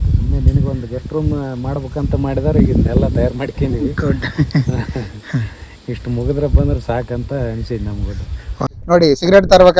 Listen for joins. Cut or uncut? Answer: cut